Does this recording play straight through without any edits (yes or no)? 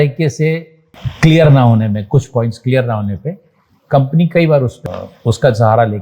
no